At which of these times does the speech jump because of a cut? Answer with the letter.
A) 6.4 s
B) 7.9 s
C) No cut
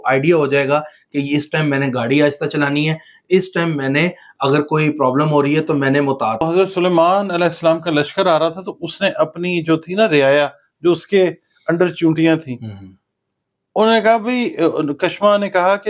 A